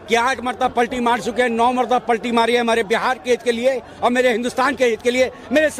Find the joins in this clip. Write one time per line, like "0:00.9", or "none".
none